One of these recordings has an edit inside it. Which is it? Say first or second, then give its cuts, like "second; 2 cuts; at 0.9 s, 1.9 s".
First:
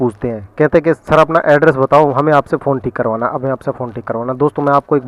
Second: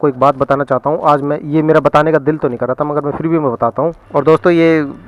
second; 1 cut; at 4.0 s